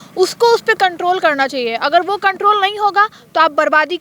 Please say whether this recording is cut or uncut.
uncut